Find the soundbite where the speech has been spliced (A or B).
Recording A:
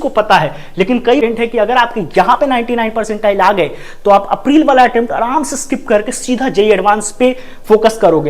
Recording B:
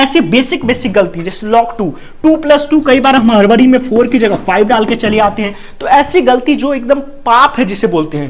A